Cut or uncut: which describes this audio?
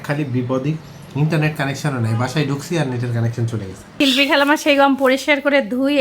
cut